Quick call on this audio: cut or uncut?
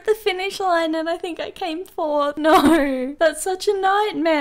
cut